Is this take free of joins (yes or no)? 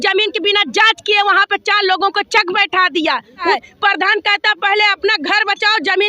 no